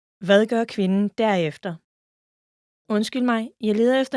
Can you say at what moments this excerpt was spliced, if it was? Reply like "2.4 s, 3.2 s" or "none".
none